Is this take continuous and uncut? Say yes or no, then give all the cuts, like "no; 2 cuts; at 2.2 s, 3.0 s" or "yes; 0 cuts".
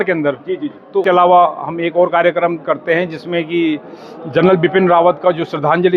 no; 1 cut; at 1.0 s